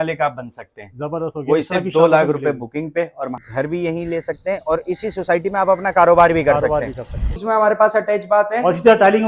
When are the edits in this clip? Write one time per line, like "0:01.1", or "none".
0:03.4
0:07.3